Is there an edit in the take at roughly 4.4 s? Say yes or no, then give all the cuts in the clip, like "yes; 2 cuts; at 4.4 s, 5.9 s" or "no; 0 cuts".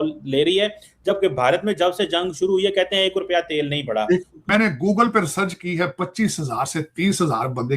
yes; 1 cut; at 4.4 s